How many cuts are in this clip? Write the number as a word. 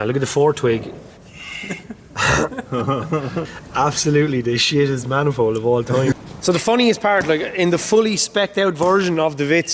two